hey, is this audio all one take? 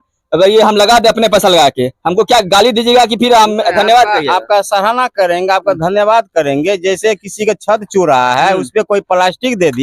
yes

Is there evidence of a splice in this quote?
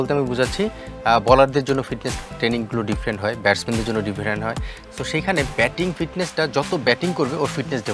no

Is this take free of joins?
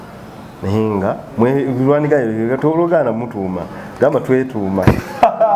yes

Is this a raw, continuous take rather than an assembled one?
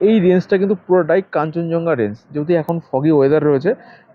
yes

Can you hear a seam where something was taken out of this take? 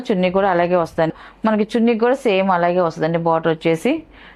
yes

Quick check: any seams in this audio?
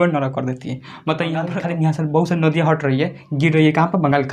yes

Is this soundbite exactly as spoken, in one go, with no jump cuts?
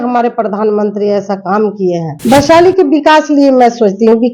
no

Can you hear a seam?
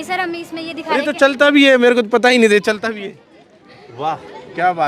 no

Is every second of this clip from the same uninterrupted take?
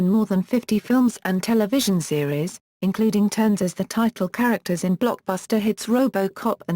no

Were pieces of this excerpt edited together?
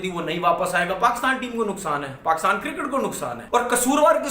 yes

